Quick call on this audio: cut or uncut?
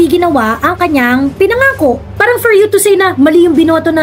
cut